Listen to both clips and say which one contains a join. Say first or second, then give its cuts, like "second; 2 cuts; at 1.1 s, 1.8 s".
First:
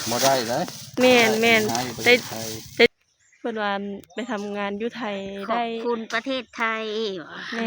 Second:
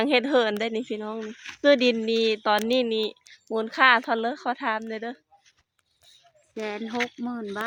first; 1 cut; at 2.9 s